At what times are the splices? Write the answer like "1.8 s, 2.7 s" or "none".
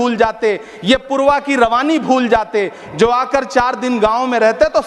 none